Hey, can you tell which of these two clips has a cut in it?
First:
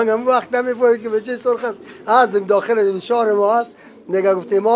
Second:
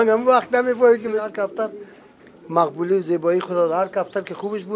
second; 1 cut; at 1.3 s

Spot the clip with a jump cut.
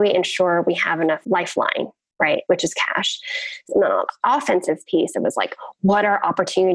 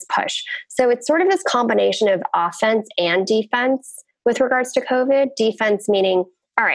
first; 2 cuts; at 1.2 s, 3.7 s

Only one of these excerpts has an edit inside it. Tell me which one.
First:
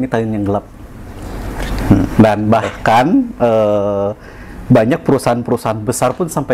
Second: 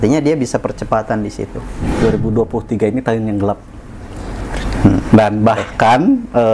second; 1 cut; at 1.8 s

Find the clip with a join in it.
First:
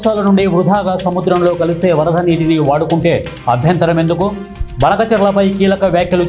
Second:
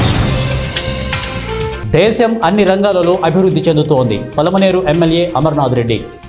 second; 1 cut; at 1.4 s

